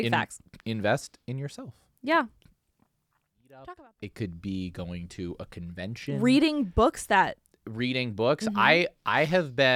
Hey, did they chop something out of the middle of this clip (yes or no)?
yes